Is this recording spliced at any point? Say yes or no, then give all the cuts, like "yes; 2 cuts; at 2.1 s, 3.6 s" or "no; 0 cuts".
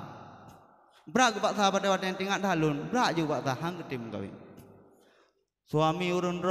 no; 0 cuts